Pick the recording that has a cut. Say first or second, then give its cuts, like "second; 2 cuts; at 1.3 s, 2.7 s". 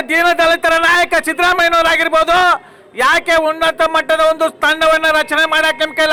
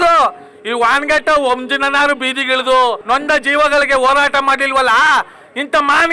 second; 1 cut; at 3.0 s